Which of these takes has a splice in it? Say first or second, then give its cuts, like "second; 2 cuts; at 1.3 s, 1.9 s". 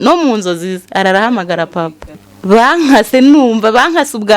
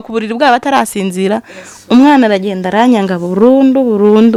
first; 1 cut; at 2.3 s